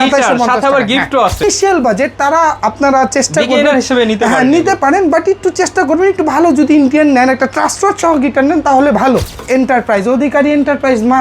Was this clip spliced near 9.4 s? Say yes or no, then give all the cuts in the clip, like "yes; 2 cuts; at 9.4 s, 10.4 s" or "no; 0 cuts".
yes; 2 cuts; at 1.4 s, 9.4 s